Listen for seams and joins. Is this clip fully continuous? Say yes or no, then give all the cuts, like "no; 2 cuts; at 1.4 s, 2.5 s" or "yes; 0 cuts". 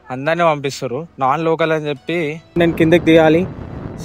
no; 1 cut; at 2.6 s